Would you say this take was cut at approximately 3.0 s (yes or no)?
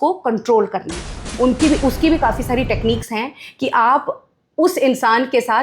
no